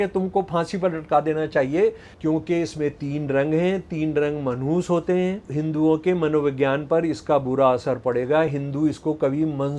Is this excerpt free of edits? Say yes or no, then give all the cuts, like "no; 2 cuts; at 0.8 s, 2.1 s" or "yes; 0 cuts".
no; 2 cuts; at 2.1 s, 5.5 s